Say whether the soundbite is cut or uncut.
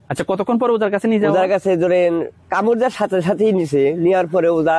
uncut